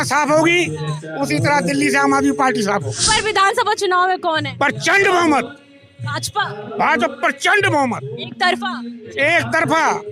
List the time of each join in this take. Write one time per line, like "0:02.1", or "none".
0:03.0